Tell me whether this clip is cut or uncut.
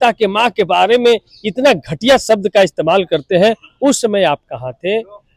uncut